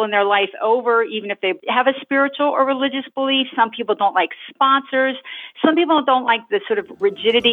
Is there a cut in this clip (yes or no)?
yes